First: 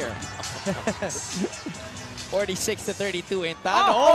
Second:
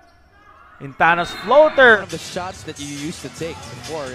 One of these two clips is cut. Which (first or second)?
second